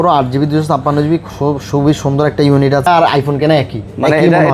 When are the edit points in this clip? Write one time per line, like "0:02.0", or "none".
0:02.9